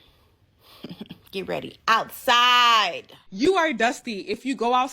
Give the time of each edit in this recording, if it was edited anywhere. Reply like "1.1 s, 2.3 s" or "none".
3.3 s

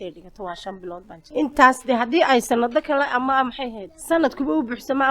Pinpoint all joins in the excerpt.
1.2 s, 3.9 s

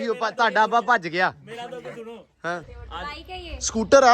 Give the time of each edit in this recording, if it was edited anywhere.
3.0 s

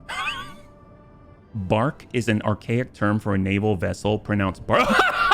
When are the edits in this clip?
1.4 s

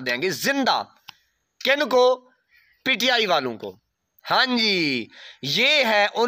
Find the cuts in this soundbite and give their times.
none

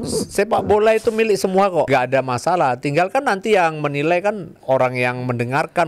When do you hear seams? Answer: 1.9 s, 4.5 s

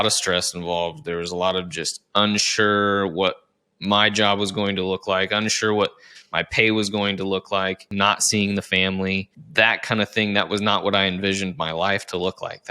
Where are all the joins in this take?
7.8 s, 9.4 s

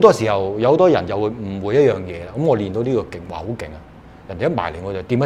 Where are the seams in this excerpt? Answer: none

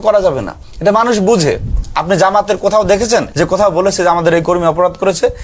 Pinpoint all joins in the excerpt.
1.8 s, 3.3 s

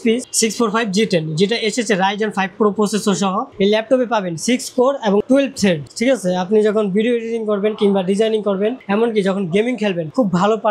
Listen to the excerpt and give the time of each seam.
none

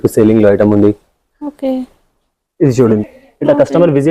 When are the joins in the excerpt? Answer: 3.0 s

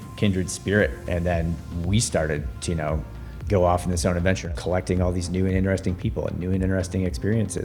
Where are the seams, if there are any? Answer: 4.5 s

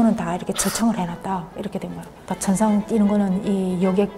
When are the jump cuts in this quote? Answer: none

